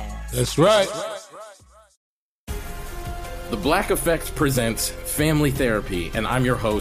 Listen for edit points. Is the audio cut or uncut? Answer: cut